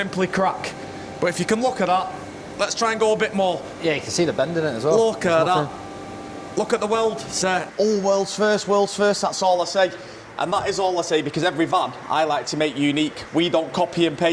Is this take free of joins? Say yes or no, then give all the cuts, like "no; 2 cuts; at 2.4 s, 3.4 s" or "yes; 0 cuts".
no; 1 cut; at 7.7 s